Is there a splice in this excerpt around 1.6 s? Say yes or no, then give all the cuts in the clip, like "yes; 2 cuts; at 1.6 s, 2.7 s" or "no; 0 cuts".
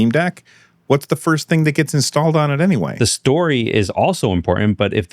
no; 1 cut; at 2.9 s